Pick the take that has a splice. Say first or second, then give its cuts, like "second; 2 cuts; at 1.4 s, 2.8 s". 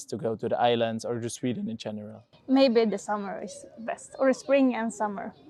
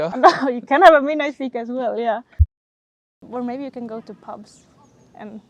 second; 1 cut; at 2.6 s